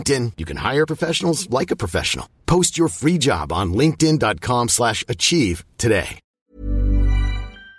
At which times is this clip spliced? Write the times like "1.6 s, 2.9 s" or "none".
6.2 s